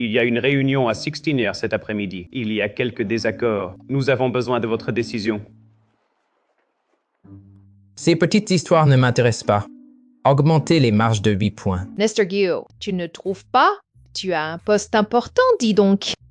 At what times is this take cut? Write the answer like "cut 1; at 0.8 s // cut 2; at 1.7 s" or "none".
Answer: cut 1; at 2.3 s // cut 2; at 11.9 s // cut 3; at 12.7 s

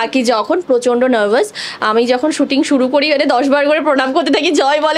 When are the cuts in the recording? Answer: none

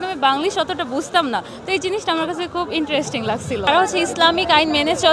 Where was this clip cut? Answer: cut 1; at 3.7 s

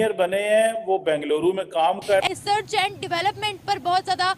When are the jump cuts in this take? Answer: cut 1; at 2.2 s

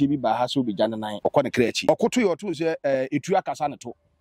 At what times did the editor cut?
cut 1; at 1.4 s

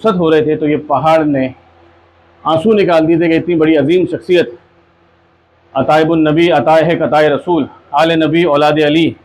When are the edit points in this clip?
none

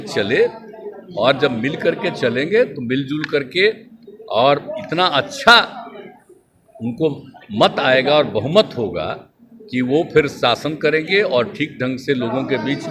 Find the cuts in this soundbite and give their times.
none

